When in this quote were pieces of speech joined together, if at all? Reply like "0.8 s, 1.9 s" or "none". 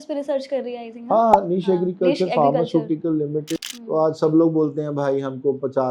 3.5 s